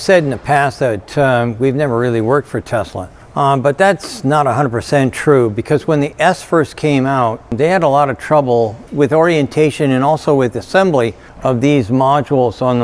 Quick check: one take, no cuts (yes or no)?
yes